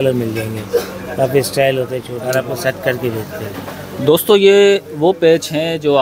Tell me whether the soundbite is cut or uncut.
cut